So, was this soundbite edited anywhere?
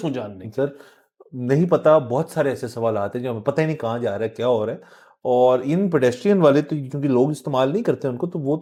no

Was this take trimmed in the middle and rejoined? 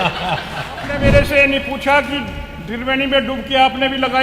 yes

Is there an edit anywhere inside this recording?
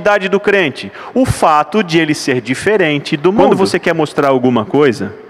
yes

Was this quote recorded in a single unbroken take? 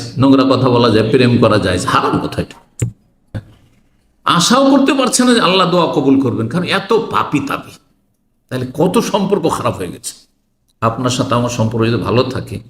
no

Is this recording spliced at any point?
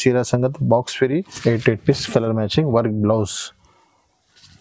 yes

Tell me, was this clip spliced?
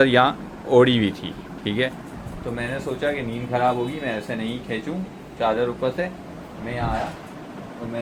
no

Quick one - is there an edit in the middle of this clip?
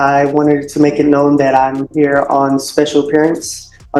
no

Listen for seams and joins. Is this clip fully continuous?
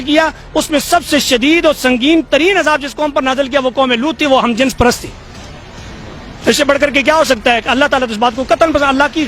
yes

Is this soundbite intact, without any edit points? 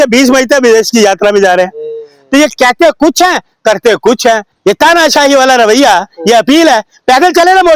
no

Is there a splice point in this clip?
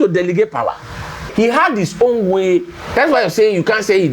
yes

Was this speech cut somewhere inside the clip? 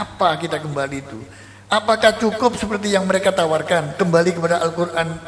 no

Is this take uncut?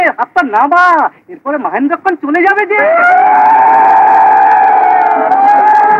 yes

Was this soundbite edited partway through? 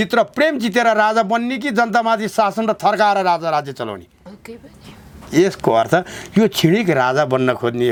no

